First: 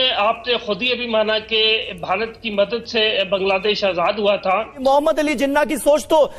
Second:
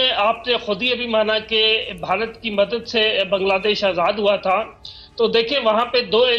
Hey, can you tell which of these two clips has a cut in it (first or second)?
first